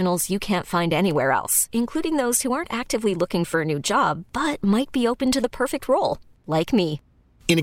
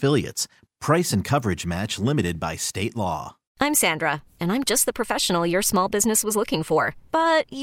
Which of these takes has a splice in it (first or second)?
second